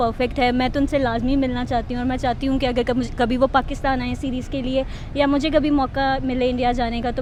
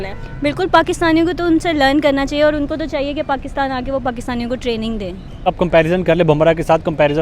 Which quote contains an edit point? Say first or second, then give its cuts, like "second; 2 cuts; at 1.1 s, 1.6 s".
second; 1 cut; at 5.4 s